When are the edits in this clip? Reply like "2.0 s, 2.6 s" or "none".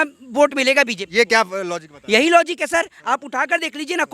none